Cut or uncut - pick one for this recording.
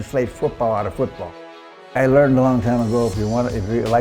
cut